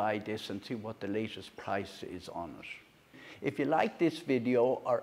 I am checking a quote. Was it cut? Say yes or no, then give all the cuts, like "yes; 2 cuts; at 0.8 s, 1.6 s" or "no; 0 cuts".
yes; 1 cut; at 3.1 s